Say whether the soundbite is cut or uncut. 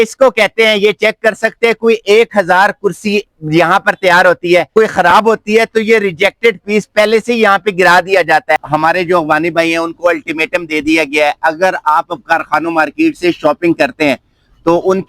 cut